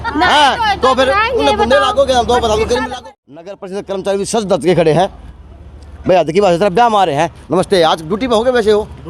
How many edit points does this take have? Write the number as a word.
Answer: one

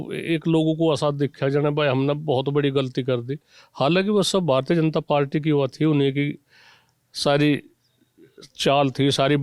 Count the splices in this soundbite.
zero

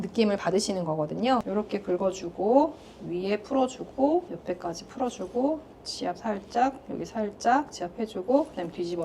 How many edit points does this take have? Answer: two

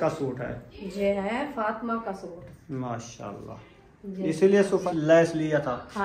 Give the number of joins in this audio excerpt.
one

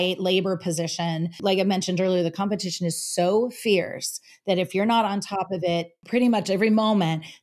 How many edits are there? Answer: two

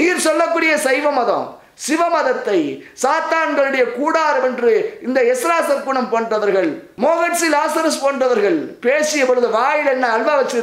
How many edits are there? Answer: one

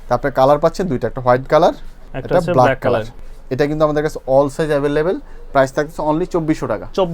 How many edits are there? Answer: zero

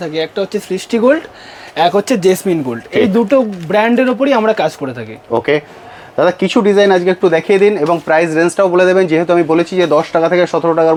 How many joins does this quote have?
zero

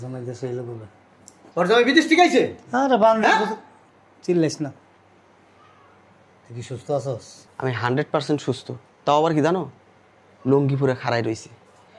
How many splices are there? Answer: two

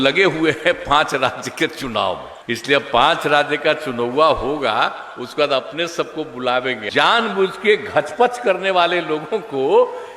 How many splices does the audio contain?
two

